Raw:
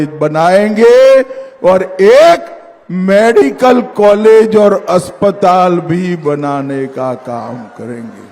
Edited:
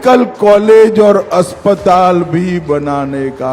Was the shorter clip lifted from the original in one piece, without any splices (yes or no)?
yes